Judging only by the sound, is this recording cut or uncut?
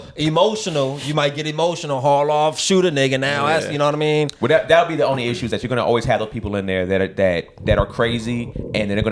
uncut